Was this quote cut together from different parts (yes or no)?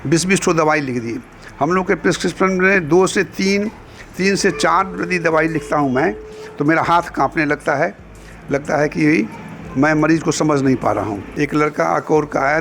yes